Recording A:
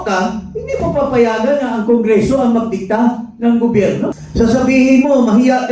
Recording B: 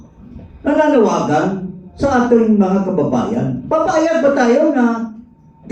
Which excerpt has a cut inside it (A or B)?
A